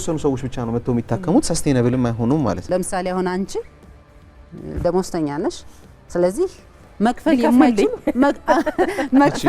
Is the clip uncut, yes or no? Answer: no